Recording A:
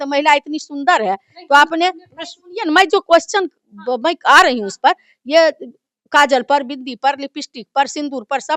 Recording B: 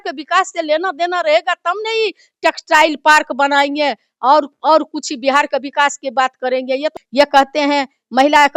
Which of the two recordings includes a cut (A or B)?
B